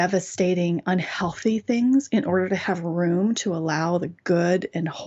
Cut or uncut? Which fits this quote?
uncut